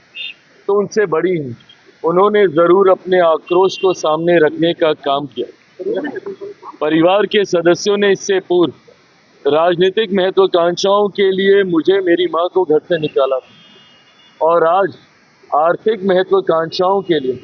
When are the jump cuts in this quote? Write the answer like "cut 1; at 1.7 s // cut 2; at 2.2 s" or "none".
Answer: none